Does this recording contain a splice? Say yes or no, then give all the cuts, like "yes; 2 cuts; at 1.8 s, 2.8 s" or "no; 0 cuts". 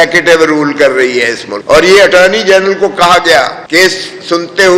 yes; 1 cut; at 1.5 s